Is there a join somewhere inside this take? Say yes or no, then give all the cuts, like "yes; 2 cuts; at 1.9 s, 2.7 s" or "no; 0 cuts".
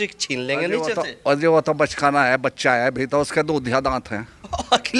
no; 0 cuts